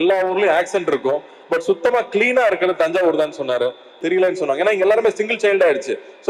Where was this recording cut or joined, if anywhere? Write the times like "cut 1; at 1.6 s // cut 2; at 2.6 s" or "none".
cut 1; at 3.9 s